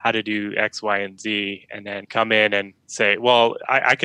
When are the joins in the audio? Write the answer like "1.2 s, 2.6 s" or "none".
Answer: 2.0 s, 2.8 s